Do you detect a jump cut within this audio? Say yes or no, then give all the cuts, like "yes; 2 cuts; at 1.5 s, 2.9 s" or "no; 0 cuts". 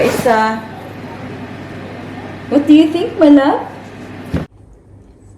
yes; 1 cut; at 4.5 s